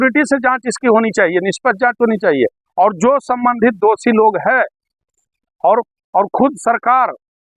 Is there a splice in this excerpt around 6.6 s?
no; 0 cuts

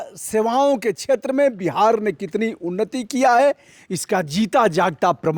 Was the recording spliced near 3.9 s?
no; 0 cuts

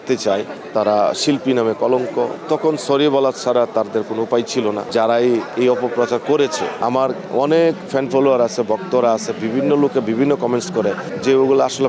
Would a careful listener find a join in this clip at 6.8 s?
yes; 2 cuts; at 2.4 s, 6.8 s

